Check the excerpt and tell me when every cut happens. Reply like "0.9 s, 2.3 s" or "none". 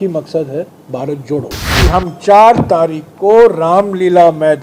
1.6 s